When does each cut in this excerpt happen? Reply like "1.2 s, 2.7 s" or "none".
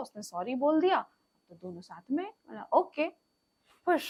none